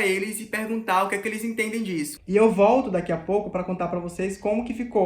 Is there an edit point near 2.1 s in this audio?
yes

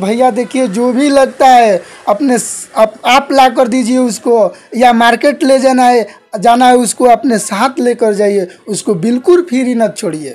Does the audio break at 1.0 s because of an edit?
no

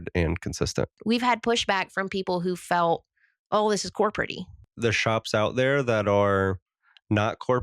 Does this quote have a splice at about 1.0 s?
yes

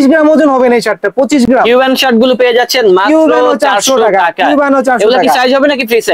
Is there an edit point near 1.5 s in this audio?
no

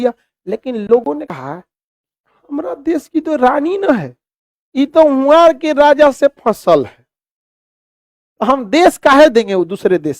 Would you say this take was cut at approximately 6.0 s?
no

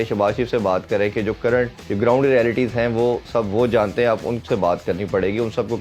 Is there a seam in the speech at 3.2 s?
no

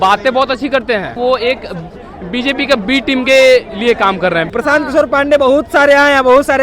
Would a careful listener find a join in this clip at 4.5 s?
yes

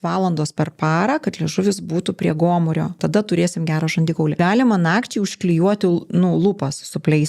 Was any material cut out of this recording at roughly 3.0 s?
yes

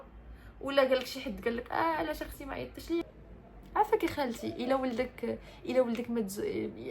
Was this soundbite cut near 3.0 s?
yes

